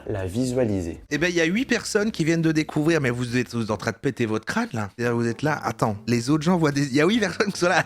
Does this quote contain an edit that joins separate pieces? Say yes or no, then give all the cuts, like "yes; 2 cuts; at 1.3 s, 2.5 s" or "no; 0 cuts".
yes; 1 cut; at 1.0 s